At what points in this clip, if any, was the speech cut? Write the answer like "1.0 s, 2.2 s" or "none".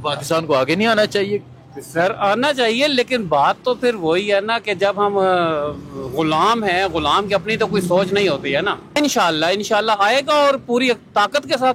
9.0 s